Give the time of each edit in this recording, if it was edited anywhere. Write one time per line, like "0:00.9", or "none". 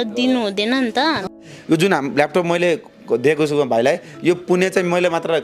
0:01.3